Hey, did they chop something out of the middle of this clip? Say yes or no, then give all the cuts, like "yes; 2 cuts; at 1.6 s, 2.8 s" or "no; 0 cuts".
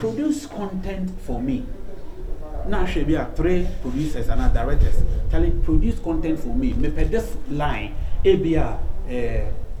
no; 0 cuts